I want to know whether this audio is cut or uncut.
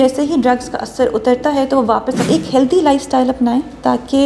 cut